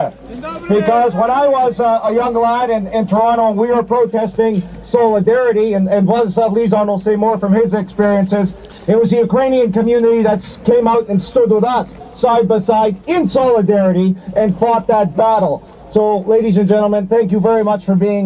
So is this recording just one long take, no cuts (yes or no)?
yes